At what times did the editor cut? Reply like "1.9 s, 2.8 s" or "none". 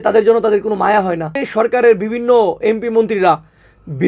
1.4 s